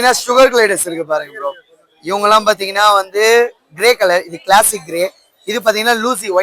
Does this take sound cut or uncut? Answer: uncut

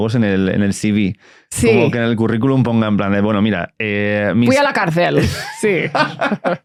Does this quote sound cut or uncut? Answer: uncut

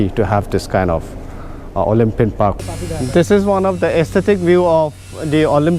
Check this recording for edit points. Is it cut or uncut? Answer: cut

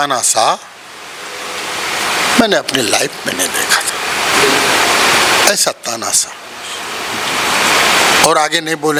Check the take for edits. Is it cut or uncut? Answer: uncut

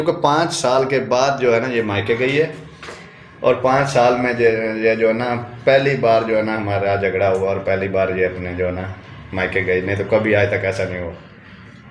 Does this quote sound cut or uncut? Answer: uncut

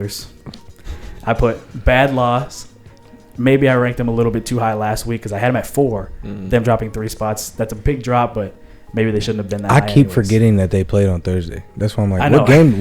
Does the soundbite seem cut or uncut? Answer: uncut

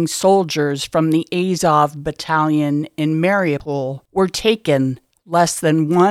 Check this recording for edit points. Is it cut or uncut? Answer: uncut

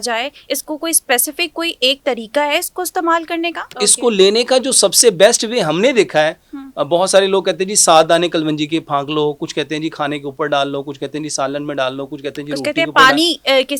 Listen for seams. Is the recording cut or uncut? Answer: cut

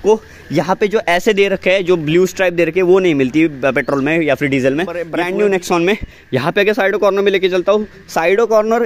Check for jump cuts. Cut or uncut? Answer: cut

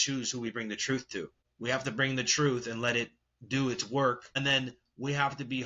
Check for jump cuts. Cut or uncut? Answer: cut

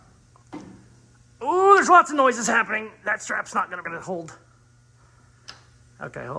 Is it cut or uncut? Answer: cut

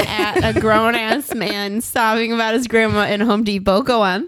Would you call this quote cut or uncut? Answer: uncut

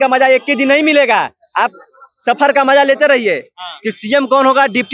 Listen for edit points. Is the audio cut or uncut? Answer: uncut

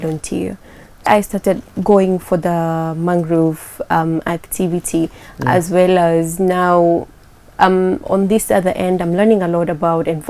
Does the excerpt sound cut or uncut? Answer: cut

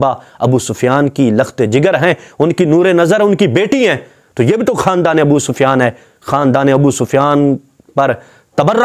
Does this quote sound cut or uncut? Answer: uncut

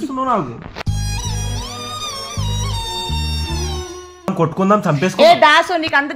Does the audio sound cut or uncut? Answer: cut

